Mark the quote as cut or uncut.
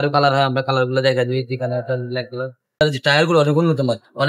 cut